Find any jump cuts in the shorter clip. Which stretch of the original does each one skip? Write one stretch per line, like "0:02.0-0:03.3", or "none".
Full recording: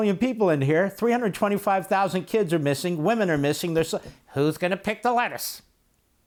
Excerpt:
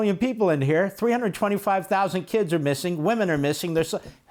none